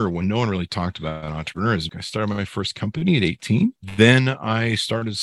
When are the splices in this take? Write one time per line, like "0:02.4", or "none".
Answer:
0:01.9
0:03.8